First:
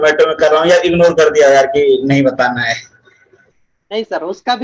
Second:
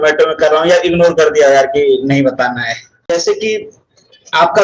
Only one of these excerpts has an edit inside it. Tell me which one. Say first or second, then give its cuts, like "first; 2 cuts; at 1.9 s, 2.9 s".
second; 1 cut; at 2.9 s